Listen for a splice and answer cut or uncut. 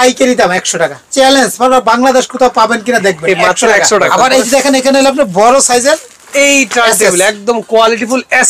cut